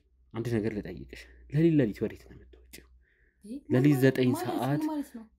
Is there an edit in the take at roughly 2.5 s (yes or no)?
no